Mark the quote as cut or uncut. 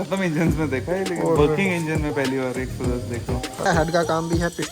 cut